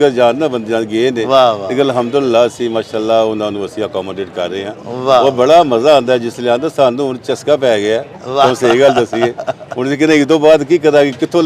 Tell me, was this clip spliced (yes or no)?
no